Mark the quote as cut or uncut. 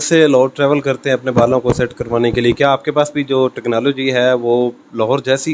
uncut